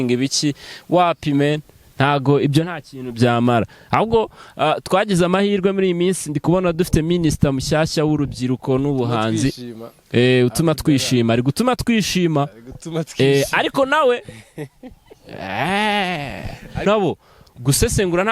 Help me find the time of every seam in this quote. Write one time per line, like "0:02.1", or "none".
0:16.9